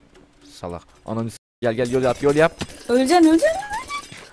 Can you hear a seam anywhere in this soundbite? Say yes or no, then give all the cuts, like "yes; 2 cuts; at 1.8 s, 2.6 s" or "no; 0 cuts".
no; 0 cuts